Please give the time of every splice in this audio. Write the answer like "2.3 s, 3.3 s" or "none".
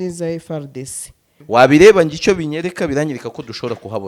1.3 s